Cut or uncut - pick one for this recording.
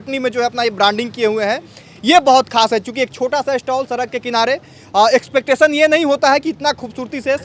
uncut